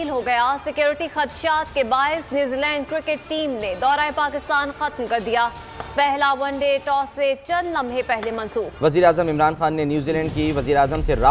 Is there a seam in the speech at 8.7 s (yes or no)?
yes